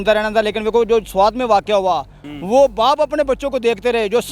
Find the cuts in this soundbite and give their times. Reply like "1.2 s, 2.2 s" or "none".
2.2 s